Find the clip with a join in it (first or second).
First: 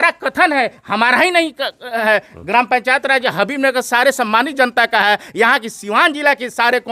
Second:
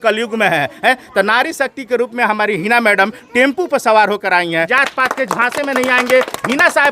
second